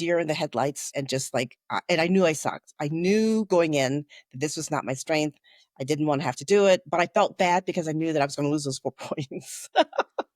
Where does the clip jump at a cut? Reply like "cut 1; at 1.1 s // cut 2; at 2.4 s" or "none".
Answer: cut 1; at 0.8 s // cut 2; at 6.8 s